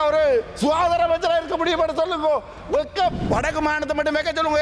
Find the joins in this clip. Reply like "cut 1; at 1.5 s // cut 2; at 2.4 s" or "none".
cut 1; at 3.2 s